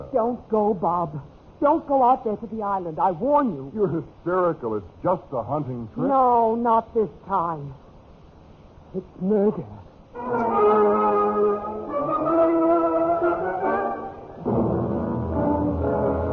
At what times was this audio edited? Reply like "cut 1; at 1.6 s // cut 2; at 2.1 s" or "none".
cut 1; at 8.2 s